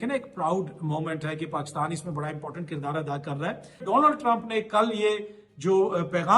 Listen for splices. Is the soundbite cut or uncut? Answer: cut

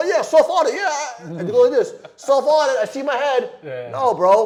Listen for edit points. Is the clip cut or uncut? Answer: uncut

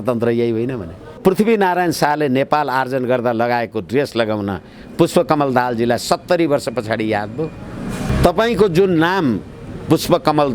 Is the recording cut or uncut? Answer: cut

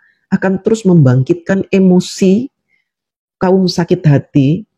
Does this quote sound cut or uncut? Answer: uncut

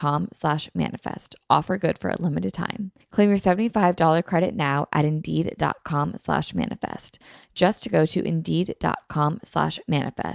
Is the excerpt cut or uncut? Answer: uncut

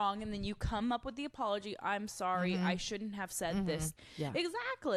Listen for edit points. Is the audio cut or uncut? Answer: cut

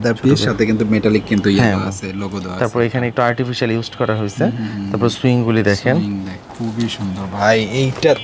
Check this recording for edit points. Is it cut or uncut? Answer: uncut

